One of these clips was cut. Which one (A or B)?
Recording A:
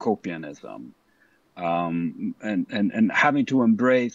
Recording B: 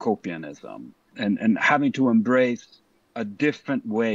B